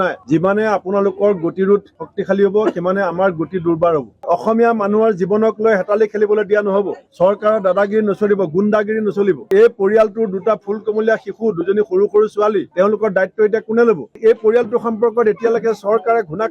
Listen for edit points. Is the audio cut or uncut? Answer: cut